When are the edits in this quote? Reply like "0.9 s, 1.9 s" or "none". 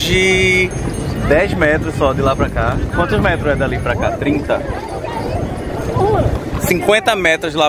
none

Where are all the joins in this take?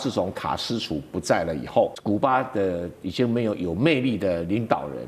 2.0 s

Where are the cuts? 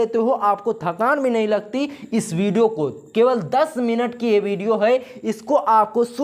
none

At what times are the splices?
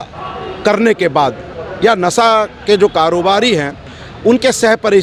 none

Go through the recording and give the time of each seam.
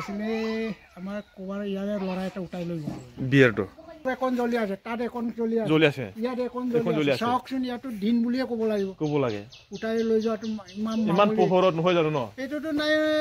4.0 s

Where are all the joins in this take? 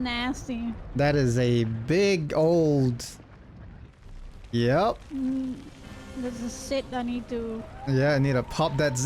none

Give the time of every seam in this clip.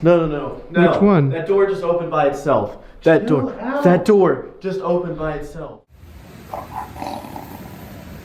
5.6 s

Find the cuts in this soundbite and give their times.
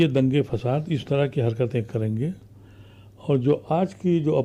none

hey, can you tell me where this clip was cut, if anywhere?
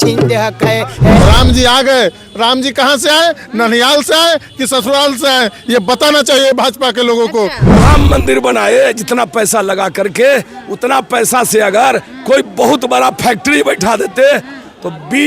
1.2 s, 7.6 s

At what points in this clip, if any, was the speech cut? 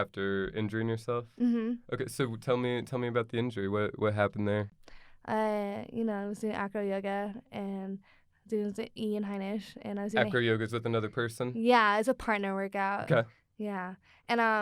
4.8 s

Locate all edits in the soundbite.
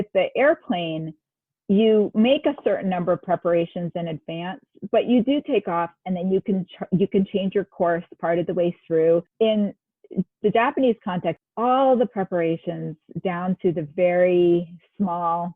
9.3 s, 11.4 s

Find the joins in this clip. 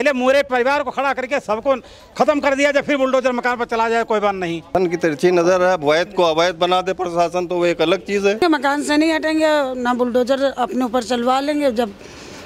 4.7 s, 8.4 s

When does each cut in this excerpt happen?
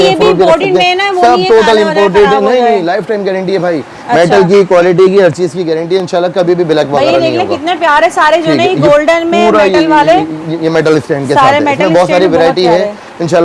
none

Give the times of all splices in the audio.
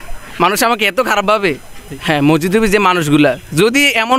1.9 s

